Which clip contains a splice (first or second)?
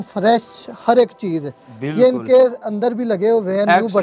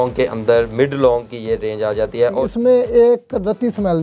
second